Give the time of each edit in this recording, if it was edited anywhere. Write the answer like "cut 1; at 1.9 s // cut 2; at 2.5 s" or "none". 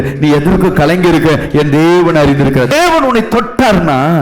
cut 1; at 2.7 s